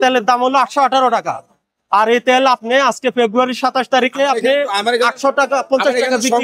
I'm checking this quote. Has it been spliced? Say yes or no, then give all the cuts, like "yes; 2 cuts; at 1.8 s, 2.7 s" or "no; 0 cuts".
no; 0 cuts